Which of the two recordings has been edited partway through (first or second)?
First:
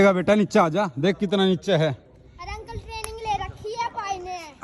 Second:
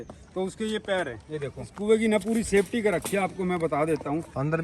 second